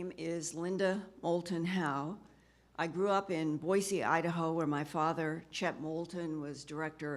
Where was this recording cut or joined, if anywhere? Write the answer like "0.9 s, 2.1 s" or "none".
2.7 s